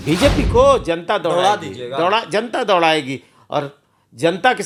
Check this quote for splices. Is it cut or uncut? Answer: uncut